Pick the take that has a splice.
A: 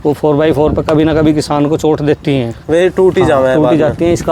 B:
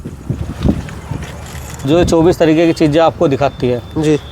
B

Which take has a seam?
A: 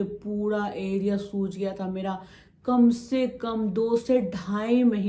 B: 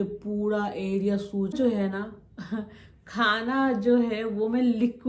B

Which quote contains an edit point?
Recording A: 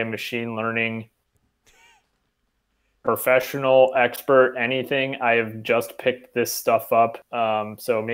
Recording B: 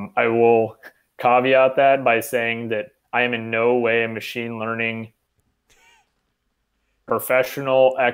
A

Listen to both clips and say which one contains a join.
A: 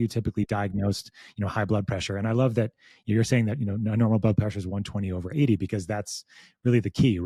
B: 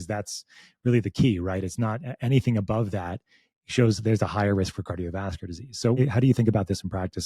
B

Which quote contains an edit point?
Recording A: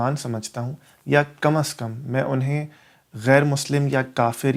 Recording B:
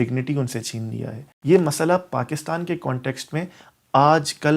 B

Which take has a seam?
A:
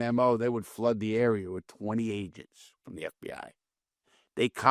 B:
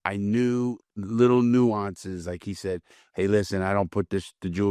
B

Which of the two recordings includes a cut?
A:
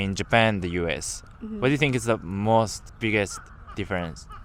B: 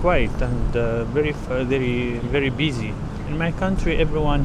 A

